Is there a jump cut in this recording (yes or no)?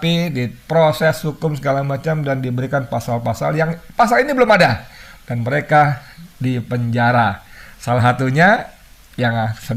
no